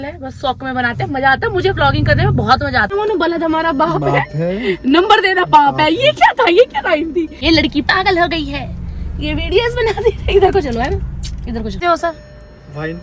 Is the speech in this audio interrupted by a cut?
yes; 3 cuts; at 2.9 s, 7.3 s, 11.8 s

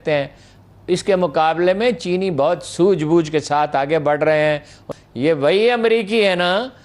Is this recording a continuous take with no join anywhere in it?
no; 1 cut; at 4.9 s

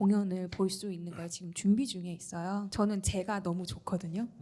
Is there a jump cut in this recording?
yes; 1 cut; at 2.7 s

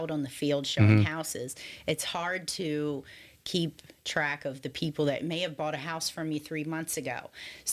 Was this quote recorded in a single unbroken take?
yes; 0 cuts

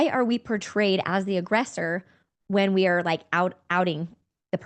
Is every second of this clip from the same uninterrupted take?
yes; 0 cuts

